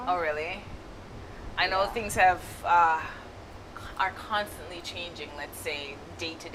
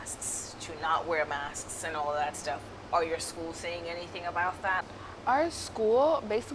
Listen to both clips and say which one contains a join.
second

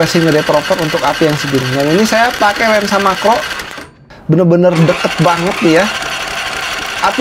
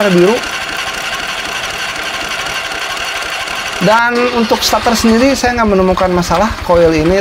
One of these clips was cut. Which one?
second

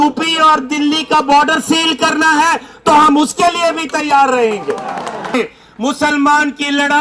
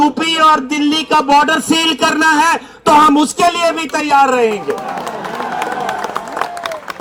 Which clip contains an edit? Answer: first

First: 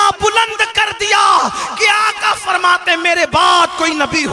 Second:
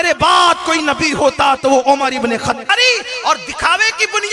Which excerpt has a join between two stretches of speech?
second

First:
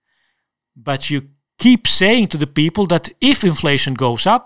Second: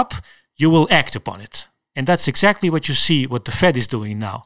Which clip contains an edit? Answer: first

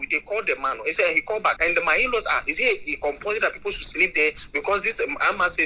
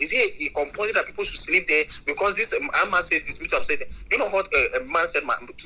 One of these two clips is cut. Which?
first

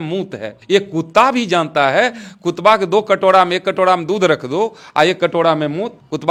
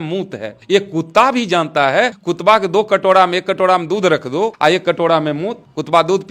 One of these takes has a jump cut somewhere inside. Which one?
second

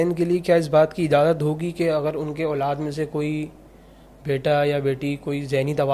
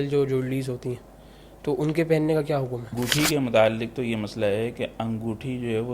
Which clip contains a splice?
second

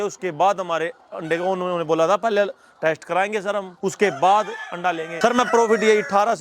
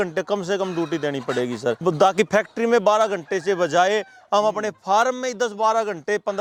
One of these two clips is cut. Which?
first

